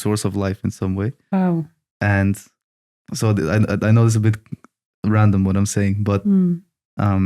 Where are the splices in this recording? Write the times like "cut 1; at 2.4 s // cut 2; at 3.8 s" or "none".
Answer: none